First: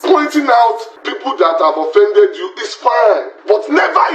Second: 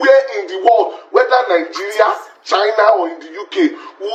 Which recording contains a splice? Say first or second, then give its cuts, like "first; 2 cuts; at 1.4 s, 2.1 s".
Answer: first; 2 cuts; at 1.4 s, 3.3 s